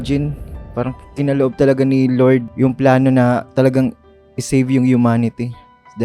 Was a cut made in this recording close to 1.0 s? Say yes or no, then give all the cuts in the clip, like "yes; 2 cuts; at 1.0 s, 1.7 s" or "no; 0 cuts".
no; 1 cut; at 2.5 s